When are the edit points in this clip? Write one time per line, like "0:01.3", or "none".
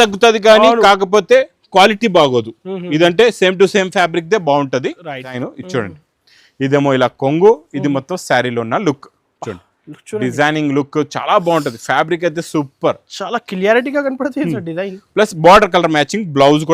0:05.4